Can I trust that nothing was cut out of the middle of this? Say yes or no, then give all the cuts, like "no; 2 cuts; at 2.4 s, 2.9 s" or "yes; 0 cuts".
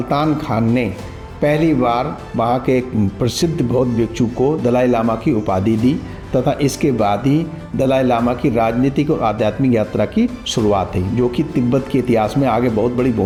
yes; 0 cuts